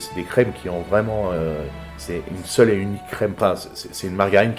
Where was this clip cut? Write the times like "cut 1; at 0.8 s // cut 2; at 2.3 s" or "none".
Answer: cut 1; at 3.4 s